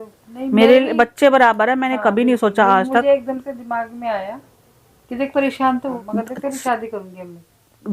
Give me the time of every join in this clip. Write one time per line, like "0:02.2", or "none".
0:06.0